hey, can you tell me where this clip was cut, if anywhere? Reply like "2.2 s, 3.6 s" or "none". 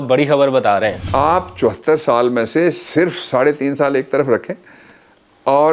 1.0 s